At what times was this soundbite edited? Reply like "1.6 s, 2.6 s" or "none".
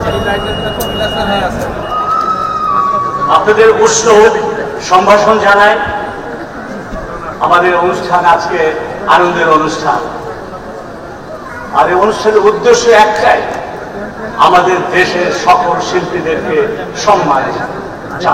none